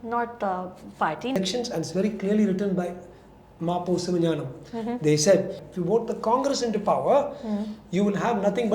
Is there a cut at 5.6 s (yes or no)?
yes